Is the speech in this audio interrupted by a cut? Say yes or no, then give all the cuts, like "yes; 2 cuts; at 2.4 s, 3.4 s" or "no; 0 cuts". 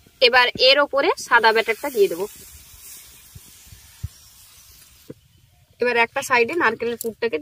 yes; 1 cut; at 5.1 s